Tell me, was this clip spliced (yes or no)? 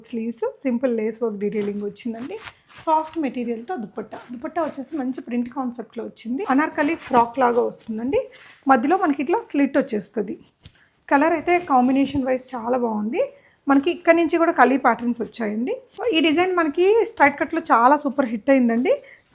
yes